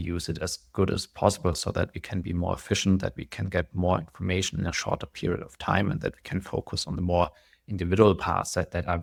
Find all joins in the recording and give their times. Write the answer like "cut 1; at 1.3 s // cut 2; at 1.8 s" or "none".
none